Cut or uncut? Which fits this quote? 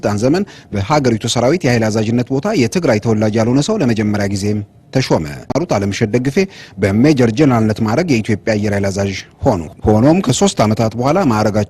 cut